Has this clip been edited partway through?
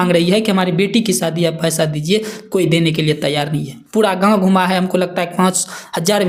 no; 0 cuts

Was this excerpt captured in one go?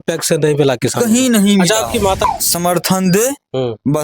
no; 1 cut; at 2.3 s

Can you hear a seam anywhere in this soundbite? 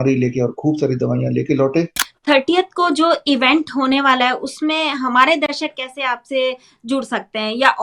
yes; 1 cut; at 2.0 s

